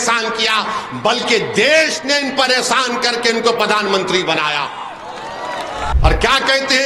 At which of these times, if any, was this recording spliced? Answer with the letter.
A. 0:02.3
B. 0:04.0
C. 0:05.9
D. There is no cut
C